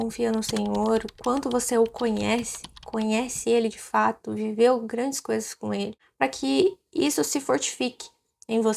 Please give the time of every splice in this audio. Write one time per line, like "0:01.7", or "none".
0:06.0